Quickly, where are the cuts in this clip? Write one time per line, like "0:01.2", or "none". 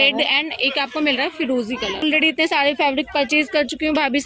0:02.0